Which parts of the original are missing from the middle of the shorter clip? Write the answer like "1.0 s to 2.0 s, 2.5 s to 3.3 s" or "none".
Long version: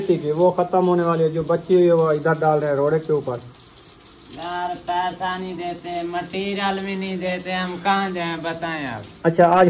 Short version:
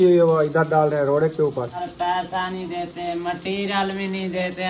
3.5 s to 4.6 s